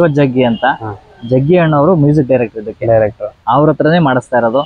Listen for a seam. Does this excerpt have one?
no; 0 cuts

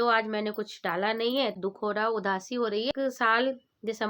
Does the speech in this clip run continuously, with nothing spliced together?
no; 2 cuts; at 1.6 s, 2.9 s

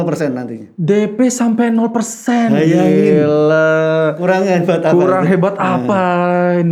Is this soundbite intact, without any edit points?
yes; 0 cuts

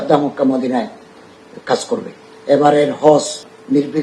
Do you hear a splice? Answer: yes; 1 cut; at 2.4 s

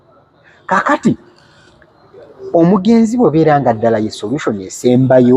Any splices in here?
no; 0 cuts

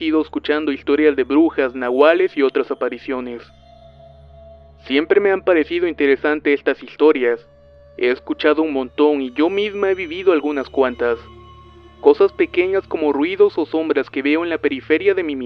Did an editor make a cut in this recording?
yes; 1 cut; at 2.5 s

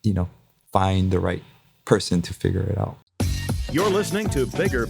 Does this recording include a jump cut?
yes; 1 cut; at 3.0 s

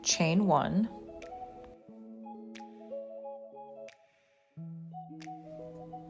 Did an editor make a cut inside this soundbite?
no; 0 cuts

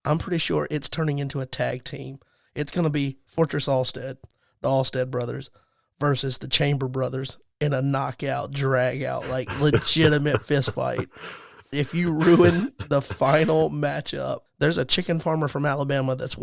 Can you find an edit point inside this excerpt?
yes; 1 cut; at 14.4 s

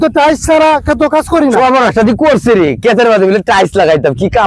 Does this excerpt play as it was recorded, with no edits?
no; 1 cut; at 1.6 s

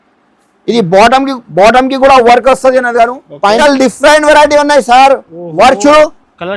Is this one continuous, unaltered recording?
no; 1 cut; at 3.6 s

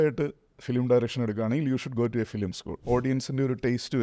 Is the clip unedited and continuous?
no; 1 cut; at 2.7 s

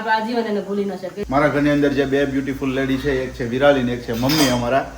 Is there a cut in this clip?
yes; 1 cut; at 1.1 s

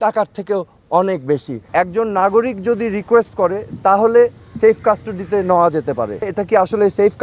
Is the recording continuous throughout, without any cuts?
no; 2 cuts; at 1.6 s, 6.2 s

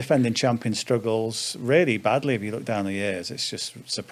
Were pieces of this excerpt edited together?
no; 0 cuts

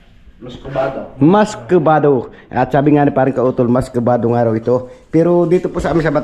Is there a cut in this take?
no; 0 cuts

